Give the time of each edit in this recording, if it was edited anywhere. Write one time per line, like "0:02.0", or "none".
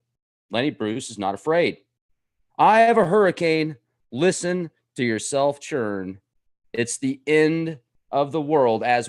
none